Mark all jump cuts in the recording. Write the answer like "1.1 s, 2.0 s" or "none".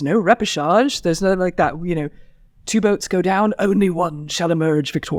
none